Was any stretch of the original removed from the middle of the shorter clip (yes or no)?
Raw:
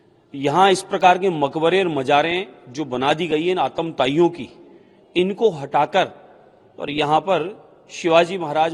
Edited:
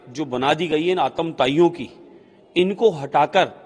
no